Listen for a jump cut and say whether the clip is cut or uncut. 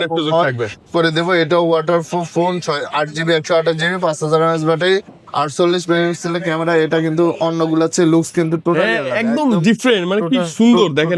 uncut